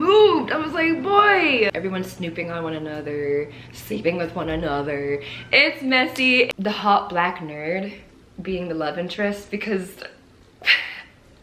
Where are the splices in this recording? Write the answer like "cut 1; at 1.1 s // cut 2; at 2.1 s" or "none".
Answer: cut 1; at 1.7 s // cut 2; at 6.5 s